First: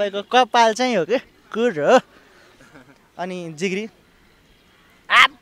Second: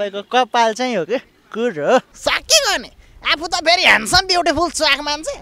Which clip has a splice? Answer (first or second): second